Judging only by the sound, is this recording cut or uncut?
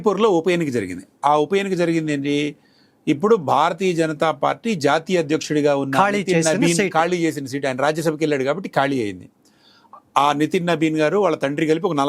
uncut